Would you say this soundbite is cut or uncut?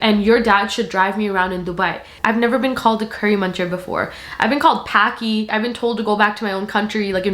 cut